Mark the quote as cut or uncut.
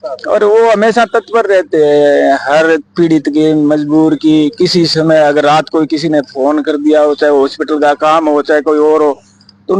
uncut